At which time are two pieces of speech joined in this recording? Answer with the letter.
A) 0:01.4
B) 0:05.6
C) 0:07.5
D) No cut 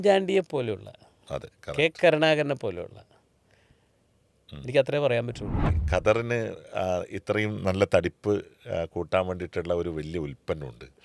B